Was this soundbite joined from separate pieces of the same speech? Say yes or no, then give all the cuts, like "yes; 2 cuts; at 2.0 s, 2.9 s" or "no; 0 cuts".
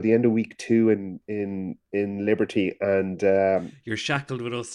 yes; 1 cut; at 3.8 s